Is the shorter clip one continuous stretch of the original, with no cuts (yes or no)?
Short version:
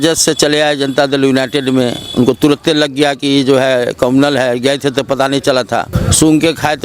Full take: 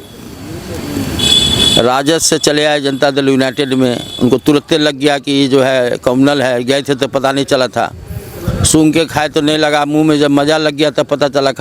no